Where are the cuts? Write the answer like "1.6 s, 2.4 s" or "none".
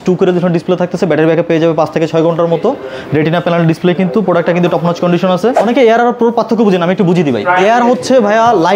5.6 s